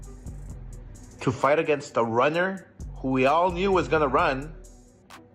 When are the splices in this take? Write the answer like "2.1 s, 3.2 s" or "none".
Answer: 1.1 s